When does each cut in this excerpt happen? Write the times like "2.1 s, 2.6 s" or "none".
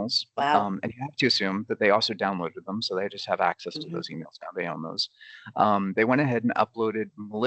none